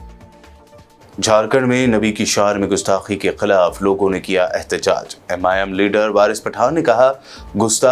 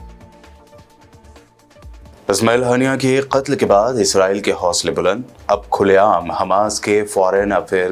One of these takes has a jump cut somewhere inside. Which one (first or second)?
first